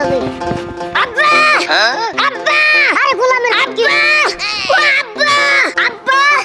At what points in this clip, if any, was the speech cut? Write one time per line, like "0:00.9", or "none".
none